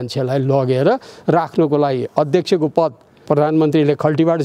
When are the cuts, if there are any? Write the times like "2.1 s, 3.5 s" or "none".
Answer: 3.2 s